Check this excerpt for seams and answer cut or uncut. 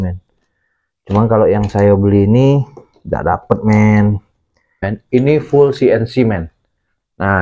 cut